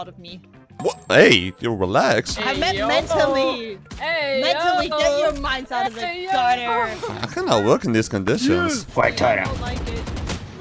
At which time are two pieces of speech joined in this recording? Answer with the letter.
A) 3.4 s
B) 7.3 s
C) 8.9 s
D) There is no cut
C